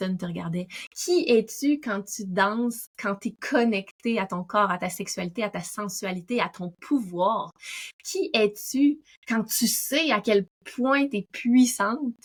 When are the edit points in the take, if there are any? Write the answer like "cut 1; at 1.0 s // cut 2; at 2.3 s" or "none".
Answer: none